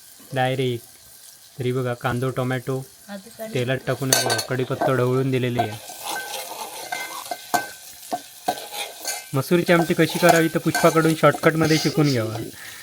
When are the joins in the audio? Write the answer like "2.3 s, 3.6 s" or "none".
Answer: none